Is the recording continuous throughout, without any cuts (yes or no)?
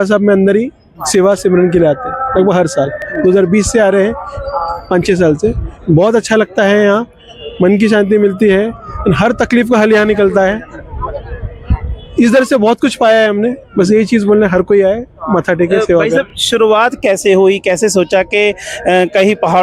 yes